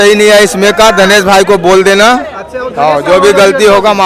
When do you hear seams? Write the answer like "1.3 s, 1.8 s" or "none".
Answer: none